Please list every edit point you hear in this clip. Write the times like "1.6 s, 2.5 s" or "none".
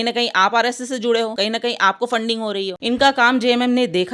1.3 s, 2.8 s